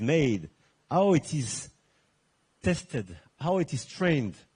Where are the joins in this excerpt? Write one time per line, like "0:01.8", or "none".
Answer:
none